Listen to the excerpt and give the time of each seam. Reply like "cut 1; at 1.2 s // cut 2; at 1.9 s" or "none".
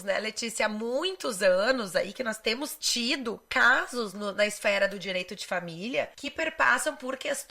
cut 1; at 2.8 s // cut 2; at 6.2 s

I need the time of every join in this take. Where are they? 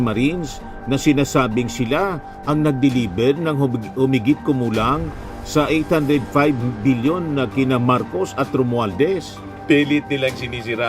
cut 1; at 9.6 s

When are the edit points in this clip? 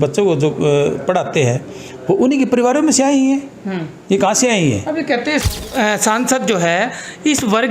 cut 1; at 5.4 s

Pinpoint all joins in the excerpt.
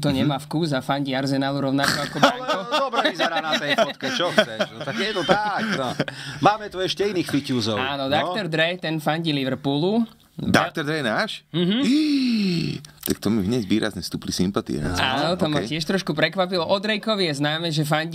none

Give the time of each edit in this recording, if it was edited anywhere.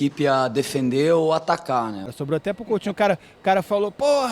cut 1; at 2.1 s

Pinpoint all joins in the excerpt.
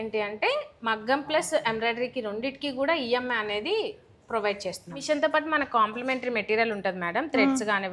cut 1; at 4.9 s

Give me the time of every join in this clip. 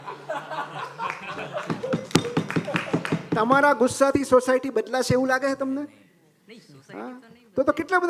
none

